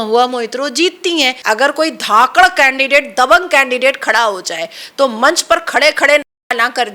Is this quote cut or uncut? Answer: cut